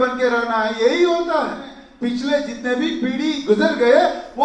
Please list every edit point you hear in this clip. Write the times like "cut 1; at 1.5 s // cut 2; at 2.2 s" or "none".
cut 1; at 1.8 s